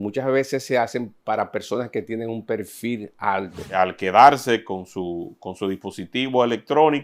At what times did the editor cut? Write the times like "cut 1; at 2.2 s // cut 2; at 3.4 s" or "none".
cut 1; at 3.6 s